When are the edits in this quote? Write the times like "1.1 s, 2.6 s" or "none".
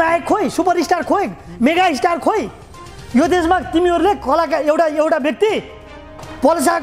none